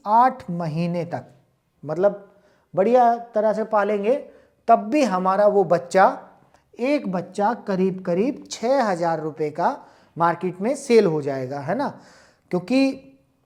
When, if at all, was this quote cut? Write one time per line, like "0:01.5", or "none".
none